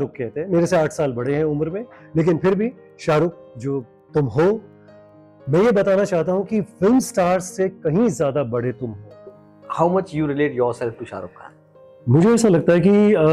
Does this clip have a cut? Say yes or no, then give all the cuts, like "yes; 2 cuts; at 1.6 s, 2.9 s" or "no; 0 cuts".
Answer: yes; 1 cut; at 9.3 s